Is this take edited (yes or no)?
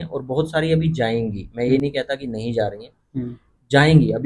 no